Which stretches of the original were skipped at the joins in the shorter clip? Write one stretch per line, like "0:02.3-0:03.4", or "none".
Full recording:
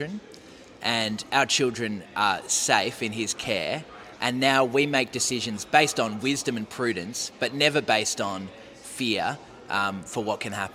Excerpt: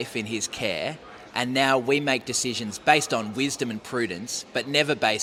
none